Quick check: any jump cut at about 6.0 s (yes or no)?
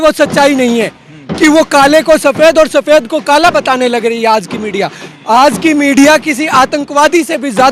no